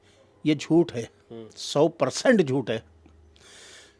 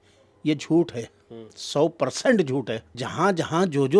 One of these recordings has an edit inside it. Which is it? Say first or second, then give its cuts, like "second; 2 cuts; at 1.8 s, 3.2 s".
second; 1 cut; at 3.0 s